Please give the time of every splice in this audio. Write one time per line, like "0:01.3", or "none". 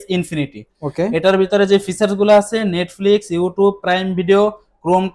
none